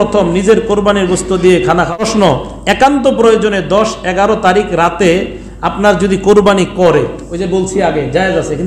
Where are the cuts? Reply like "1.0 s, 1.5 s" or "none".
1.9 s

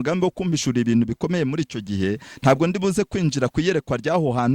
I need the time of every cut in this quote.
none

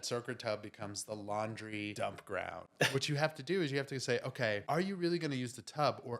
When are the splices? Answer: 1.9 s, 2.9 s, 4.6 s

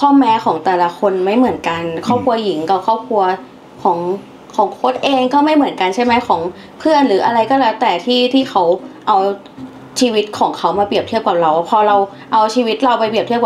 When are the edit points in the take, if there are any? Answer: none

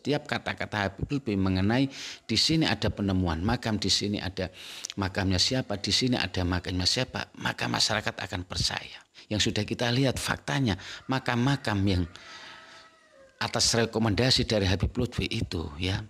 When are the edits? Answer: 9.1 s

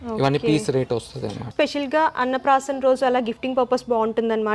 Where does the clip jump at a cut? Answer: 1.4 s

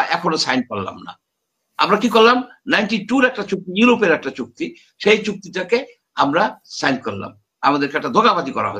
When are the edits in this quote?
none

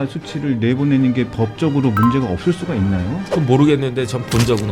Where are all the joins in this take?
none

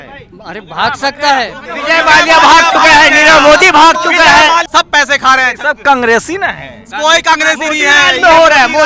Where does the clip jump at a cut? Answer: 1.7 s, 4.7 s

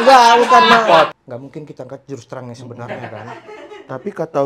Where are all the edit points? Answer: 1.2 s

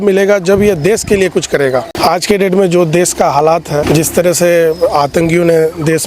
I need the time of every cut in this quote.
1.9 s, 3.8 s

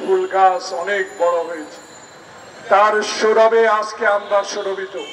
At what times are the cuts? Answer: none

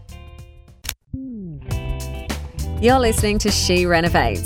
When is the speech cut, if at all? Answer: 1.0 s

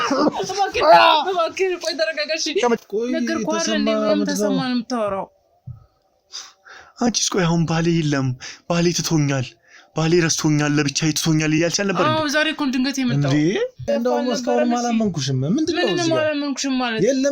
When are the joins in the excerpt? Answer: 2.8 s, 13.9 s

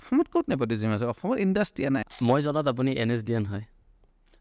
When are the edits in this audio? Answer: 2.0 s

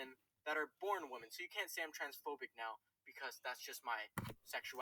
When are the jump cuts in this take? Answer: none

